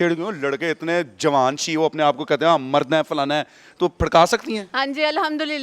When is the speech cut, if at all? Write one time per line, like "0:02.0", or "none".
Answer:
0:04.7